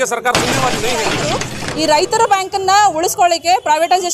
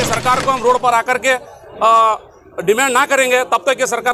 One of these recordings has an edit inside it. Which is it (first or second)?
first